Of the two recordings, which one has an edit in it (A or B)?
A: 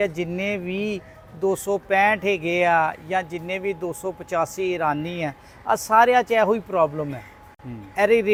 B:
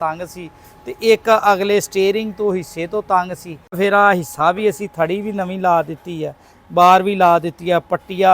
B